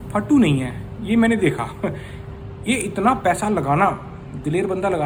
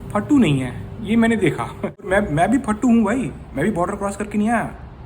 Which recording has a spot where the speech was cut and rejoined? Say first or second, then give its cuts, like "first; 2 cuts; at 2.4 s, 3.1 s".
second; 1 cut; at 1.9 s